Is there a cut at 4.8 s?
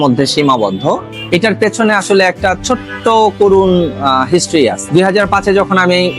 yes; 2 cuts; at 1.2 s, 4.8 s

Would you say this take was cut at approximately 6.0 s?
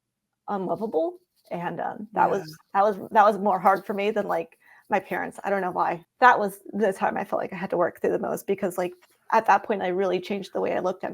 yes; 1 cut; at 6.0 s

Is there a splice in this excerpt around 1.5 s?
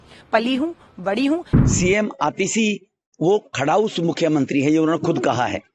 yes; 1 cut; at 1.5 s

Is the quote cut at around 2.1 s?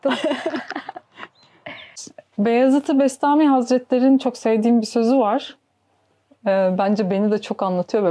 yes; 1 cut; at 2.1 s

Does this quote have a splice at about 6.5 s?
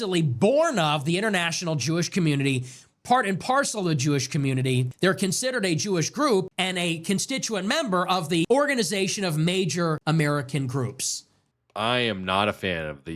yes; 5 cuts; at 4.9 s, 6.5 s, 8.5 s, 10.0 s, 11.2 s

